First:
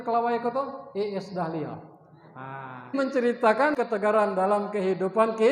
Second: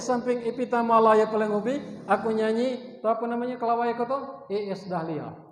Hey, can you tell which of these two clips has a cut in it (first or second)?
first